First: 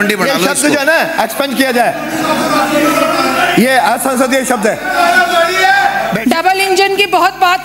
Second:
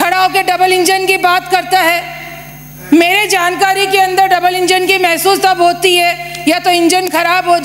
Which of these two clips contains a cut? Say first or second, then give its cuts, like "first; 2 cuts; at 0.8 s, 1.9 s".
first; 1 cut; at 6.2 s